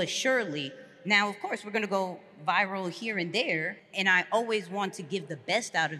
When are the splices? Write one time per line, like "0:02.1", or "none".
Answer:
0:03.8